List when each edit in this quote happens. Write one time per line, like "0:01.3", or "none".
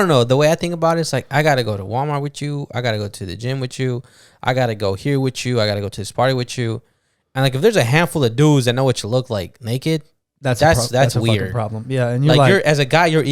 none